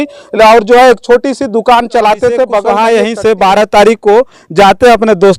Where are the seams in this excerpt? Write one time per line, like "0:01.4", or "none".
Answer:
0:02.7